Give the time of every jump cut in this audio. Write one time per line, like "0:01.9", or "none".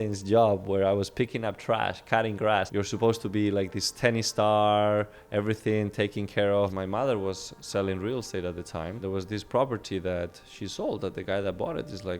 0:02.7
0:06.7
0:09.0